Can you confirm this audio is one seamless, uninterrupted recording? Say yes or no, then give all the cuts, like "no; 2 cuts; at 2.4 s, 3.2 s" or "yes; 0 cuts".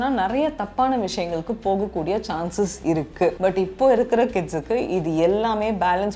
no; 1 cut; at 3.4 s